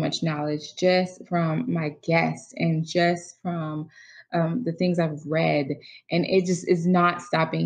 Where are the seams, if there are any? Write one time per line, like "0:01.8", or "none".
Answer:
none